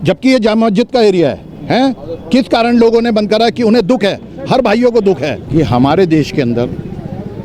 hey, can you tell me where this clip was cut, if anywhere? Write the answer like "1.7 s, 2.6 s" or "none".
5.4 s